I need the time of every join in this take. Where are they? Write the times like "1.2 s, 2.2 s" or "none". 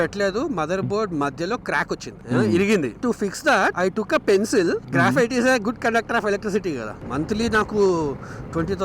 2.1 s, 3.0 s, 7.0 s

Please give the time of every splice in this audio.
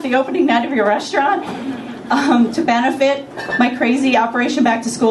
1.9 s

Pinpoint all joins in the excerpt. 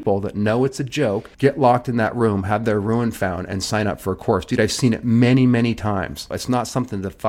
1.3 s, 6.3 s

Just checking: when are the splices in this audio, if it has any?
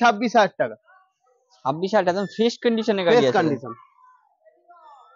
none

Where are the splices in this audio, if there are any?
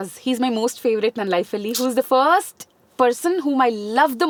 none

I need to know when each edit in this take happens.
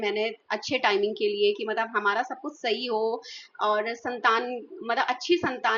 none

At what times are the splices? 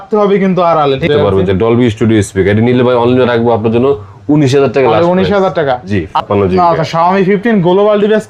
1.1 s, 6.1 s

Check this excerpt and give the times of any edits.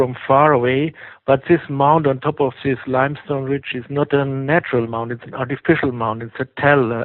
1.4 s

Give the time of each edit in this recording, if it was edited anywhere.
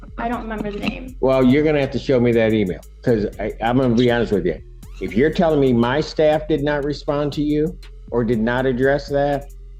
none

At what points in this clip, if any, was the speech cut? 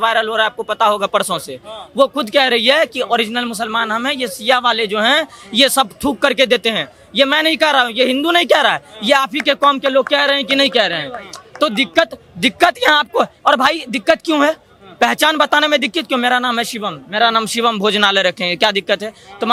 none

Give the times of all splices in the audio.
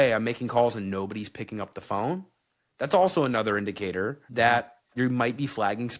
4.2 s

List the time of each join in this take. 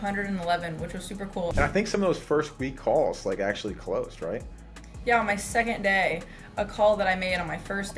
1.5 s

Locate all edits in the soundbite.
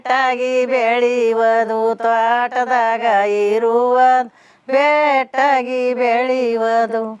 none

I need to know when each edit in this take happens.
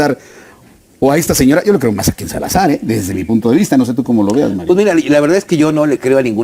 none

